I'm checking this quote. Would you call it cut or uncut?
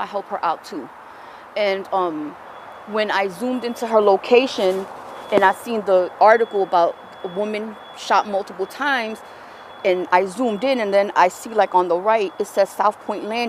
uncut